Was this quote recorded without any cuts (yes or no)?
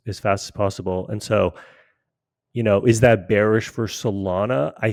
yes